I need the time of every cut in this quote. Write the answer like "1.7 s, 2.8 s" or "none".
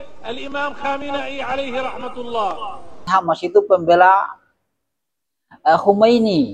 3.0 s